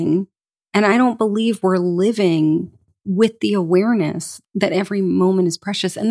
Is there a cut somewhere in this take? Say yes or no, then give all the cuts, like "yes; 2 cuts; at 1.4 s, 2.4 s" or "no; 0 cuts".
yes; 1 cut; at 4.3 s